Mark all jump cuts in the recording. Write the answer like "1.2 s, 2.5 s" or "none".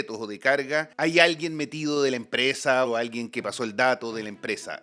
0.9 s, 2.9 s